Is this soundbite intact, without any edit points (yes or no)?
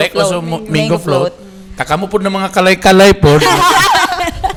yes